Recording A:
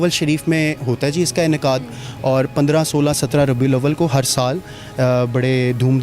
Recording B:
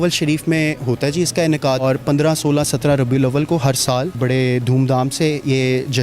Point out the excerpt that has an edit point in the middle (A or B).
B